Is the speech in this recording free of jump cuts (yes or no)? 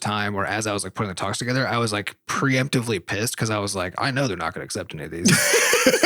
yes